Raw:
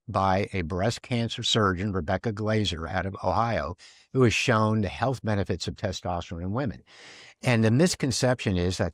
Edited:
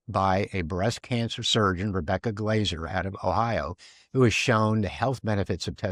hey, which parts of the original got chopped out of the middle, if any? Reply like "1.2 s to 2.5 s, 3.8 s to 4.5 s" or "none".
none